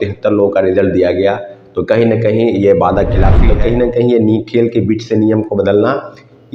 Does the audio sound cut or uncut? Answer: cut